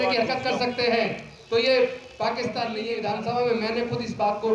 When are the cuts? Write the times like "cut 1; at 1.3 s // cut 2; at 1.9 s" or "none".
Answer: cut 1; at 2.8 s